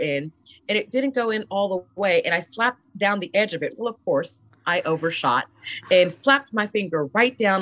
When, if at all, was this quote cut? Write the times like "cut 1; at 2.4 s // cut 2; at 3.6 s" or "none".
none